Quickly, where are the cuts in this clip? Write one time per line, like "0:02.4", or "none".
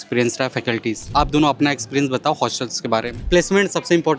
0:01.1
0:03.2

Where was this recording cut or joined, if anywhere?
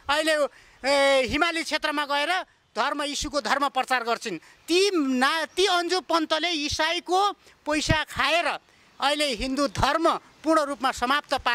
none

